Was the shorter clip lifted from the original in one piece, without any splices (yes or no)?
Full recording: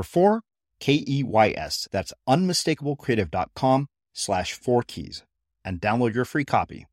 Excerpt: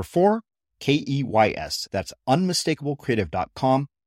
yes